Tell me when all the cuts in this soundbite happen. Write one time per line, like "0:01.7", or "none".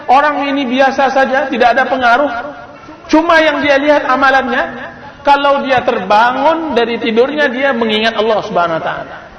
none